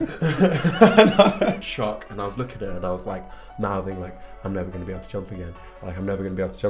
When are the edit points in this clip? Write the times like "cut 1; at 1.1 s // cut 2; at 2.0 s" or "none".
cut 1; at 1.6 s